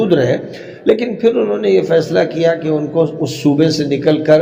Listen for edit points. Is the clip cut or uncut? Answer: uncut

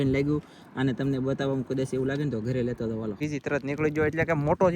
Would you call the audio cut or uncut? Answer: cut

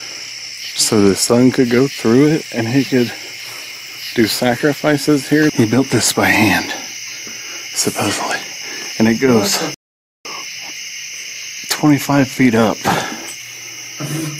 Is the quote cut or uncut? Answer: cut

